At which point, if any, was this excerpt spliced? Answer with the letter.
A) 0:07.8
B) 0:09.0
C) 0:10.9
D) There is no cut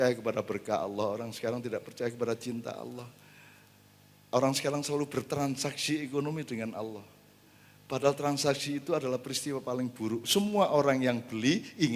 D